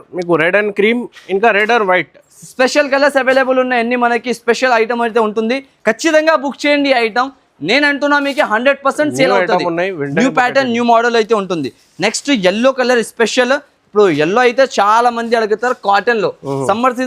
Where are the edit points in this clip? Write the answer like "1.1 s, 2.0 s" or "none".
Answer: none

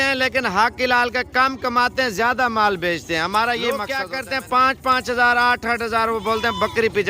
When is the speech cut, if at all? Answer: 4.0 s

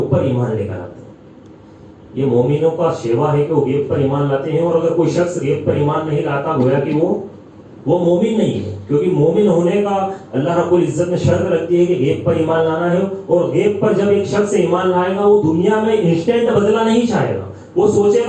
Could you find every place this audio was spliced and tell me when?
none

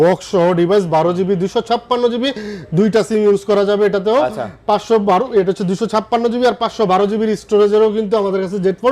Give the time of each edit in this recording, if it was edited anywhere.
none

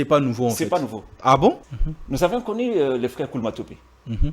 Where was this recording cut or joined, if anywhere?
1.6 s

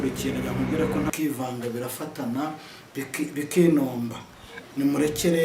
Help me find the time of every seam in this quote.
1.1 s

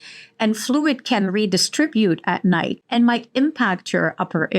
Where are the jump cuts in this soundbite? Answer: 2.8 s

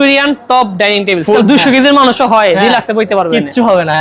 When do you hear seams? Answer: 1.4 s

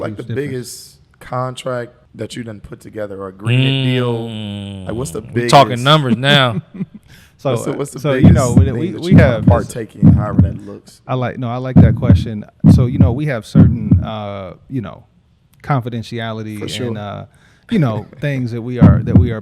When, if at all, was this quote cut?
2.0 s

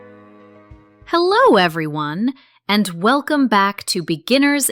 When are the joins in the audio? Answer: 1.0 s

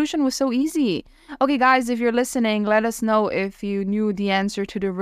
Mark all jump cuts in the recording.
none

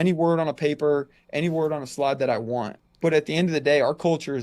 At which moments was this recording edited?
2.7 s

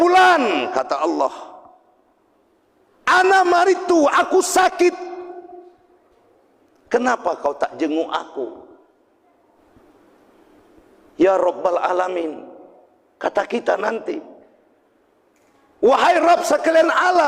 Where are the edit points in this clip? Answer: 3.0 s, 9.6 s

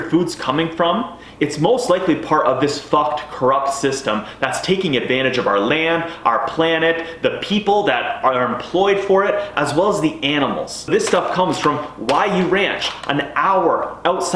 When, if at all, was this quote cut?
10.9 s

